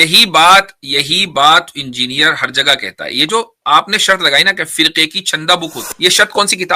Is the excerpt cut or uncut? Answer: cut